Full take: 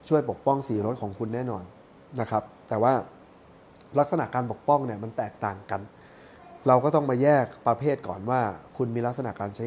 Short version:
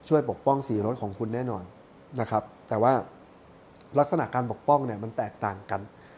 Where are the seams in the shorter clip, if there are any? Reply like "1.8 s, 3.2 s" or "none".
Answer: none